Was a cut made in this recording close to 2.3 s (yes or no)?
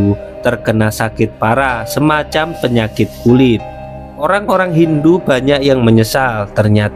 no